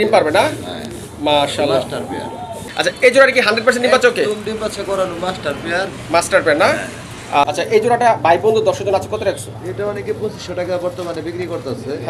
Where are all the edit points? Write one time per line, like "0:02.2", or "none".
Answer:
0:02.6
0:07.5